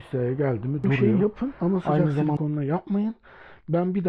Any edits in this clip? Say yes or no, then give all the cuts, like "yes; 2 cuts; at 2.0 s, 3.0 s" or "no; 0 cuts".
yes; 1 cut; at 0.9 s